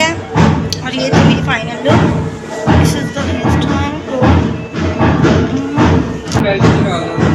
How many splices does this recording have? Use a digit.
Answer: 1